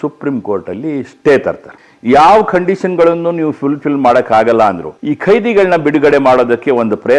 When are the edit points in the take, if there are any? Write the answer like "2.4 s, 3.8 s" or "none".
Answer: 1.9 s, 4.9 s